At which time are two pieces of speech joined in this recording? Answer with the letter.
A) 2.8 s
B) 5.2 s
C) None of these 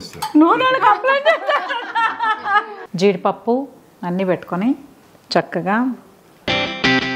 A